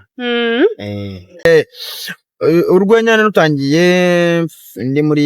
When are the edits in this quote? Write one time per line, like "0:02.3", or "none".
0:01.4